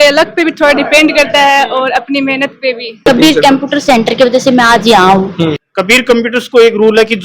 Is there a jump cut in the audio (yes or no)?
yes